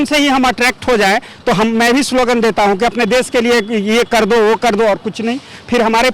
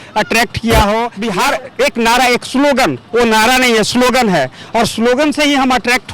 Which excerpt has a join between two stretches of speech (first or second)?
second